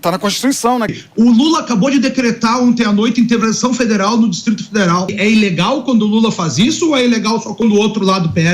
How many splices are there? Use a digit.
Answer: 3